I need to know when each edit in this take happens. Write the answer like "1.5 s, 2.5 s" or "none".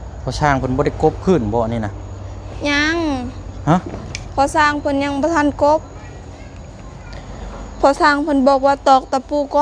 none